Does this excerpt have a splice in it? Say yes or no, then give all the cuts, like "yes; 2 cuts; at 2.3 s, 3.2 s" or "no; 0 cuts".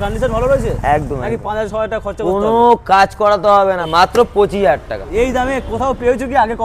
yes; 3 cuts; at 1.4 s, 3.8 s, 5.1 s